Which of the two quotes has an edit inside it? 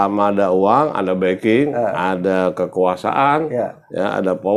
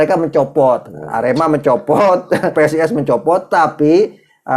second; 1 cut; at 2.5 s

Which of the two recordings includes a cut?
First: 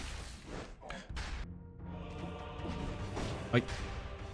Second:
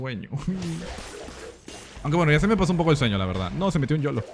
first; 1 cut; at 1.4 s

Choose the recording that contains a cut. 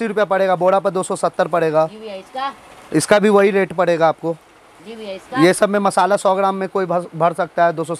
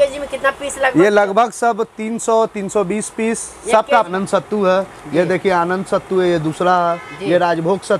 second; 1 cut; at 4.1 s

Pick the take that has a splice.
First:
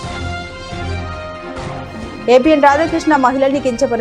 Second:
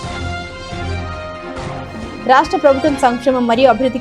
first; 1 cut; at 1.9 s

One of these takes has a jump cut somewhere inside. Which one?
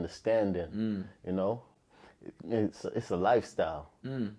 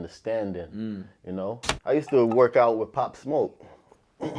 second; 1 cut; at 1.7 s

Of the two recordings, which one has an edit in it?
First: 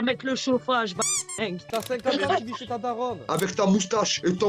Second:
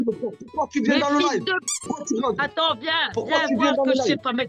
first; 2 cuts; at 1.6 s, 3.3 s

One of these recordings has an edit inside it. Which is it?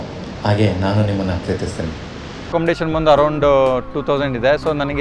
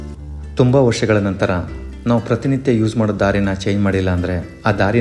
first; 1 cut; at 2.5 s

